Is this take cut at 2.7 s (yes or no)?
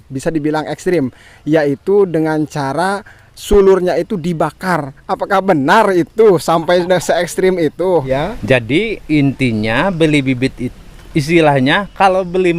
no